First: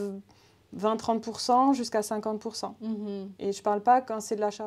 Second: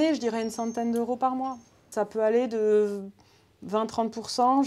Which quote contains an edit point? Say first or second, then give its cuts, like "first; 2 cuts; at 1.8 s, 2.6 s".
second; 1 cut; at 1.9 s